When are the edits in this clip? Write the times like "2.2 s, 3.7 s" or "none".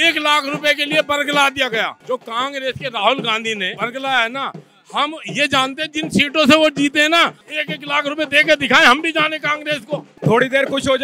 2.0 s, 3.7 s, 7.4 s, 10.1 s